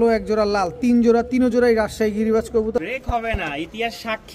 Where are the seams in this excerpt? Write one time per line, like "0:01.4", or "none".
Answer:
0:02.8